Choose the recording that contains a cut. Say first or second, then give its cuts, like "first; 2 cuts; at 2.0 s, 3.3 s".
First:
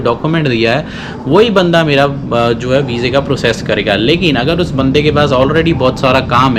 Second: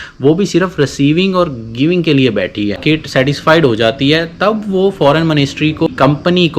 second; 2 cuts; at 2.8 s, 5.9 s